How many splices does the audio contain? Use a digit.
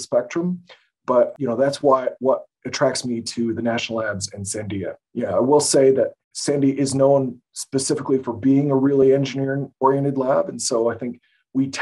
3